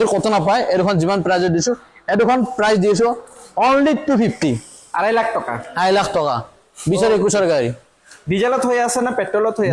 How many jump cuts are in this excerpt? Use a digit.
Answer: 0